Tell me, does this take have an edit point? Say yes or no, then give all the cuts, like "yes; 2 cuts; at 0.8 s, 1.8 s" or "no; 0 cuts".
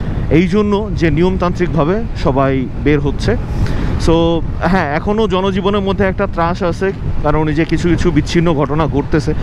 no; 0 cuts